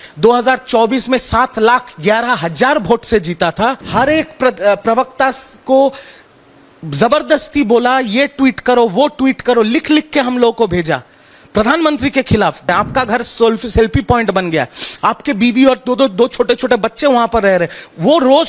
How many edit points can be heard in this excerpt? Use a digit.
2